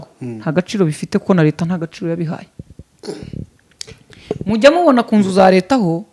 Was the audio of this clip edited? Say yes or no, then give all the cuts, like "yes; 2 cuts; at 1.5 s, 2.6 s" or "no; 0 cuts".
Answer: no; 0 cuts